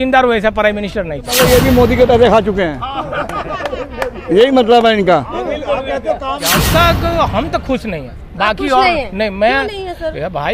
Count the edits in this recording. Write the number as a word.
two